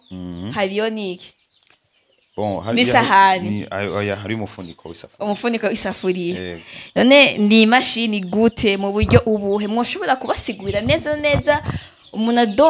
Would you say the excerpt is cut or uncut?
uncut